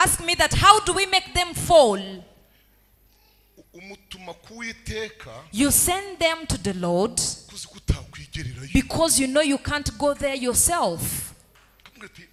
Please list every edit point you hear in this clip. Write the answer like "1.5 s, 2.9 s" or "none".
none